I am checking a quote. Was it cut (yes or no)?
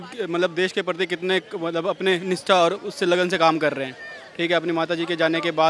no